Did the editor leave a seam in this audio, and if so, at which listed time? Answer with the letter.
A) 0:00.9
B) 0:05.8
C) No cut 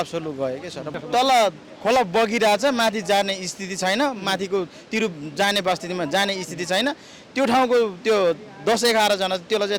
A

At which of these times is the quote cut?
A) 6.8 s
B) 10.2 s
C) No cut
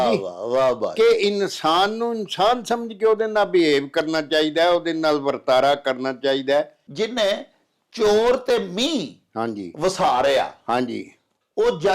A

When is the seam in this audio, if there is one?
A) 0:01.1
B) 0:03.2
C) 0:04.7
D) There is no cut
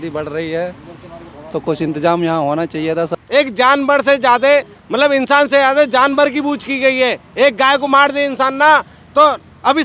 B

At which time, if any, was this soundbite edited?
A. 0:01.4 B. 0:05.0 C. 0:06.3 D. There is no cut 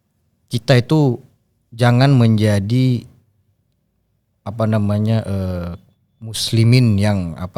D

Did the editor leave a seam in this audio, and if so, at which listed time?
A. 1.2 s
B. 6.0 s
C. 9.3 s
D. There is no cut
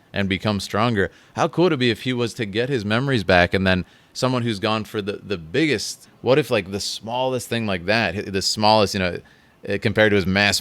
B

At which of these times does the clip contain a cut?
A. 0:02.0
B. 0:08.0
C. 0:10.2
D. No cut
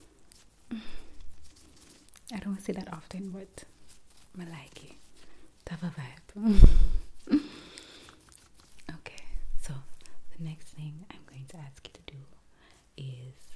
D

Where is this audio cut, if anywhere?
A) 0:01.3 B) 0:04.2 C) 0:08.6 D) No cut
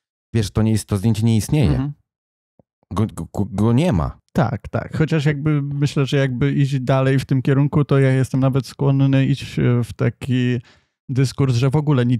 B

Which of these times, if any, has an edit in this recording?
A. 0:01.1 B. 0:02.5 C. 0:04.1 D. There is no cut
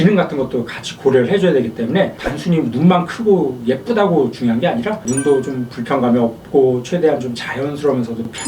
D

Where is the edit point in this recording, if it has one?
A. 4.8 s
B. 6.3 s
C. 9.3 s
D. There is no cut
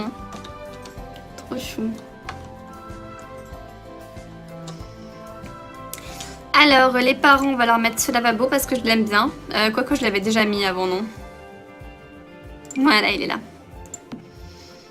A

